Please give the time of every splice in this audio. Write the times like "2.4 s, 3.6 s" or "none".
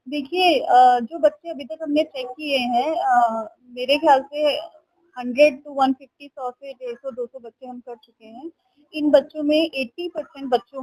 none

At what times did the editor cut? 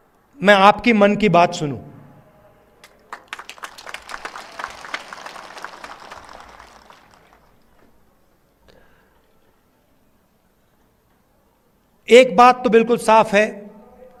none

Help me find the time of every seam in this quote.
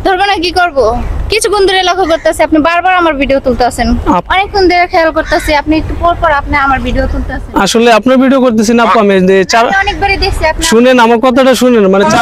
4.2 s

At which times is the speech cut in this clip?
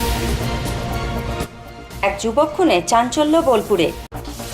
none

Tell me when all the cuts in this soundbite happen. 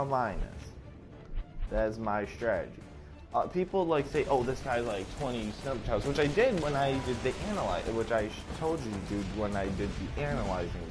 none

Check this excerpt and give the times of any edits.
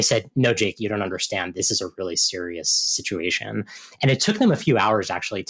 1.5 s

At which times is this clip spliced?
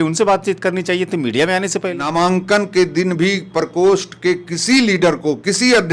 2.0 s

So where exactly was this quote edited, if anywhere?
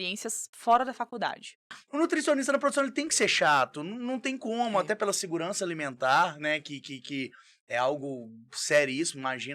1.8 s

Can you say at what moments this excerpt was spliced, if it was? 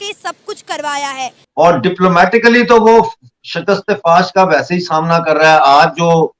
1.4 s

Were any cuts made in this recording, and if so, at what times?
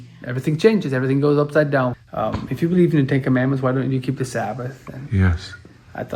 1.9 s

